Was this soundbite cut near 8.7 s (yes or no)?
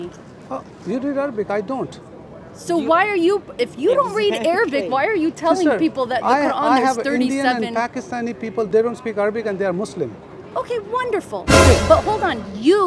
yes